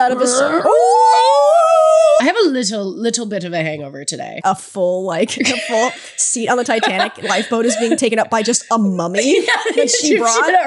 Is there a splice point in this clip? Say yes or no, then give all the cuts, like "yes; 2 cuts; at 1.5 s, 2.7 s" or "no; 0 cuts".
yes; 2 cuts; at 2.2 s, 4.4 s